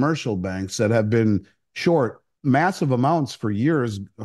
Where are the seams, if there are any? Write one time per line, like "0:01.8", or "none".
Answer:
0:02.3